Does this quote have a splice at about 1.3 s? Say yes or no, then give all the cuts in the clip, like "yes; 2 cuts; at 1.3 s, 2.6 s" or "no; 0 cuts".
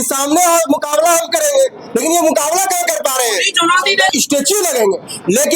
no; 1 cut; at 4.0 s